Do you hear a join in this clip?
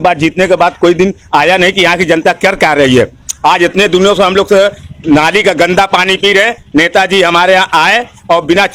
no; 0 cuts

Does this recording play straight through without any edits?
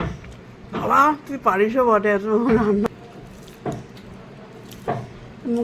no; 1 cut; at 2.9 s

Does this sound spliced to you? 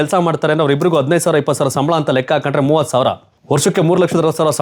no; 0 cuts

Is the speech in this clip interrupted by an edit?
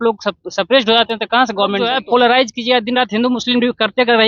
yes; 1 cut; at 1.9 s

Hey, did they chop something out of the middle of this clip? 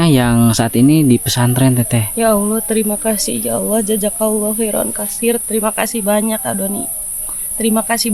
no; 0 cuts

